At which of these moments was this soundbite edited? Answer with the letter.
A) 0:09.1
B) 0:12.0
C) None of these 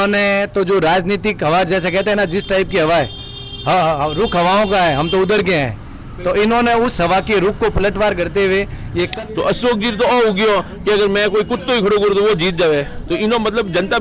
A